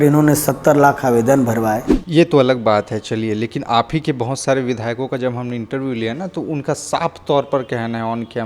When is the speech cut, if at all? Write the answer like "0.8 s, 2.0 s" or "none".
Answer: 1.9 s